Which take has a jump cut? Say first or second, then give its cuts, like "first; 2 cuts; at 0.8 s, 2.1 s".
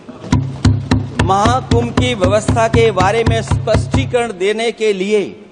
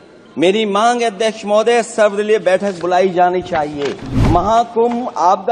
second; 1 cut; at 4.1 s